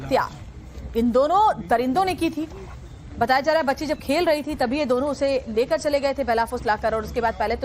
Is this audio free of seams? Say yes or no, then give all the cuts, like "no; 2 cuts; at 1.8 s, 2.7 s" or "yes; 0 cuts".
no; 1 cut; at 4.1 s